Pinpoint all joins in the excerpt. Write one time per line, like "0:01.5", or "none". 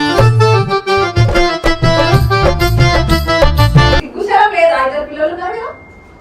0:04.1